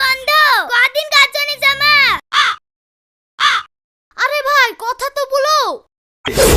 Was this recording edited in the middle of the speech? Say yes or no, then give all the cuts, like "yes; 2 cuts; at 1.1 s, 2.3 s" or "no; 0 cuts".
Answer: yes; 1 cut; at 2.3 s